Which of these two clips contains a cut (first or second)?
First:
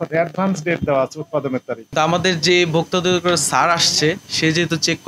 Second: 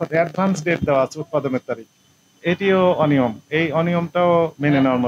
first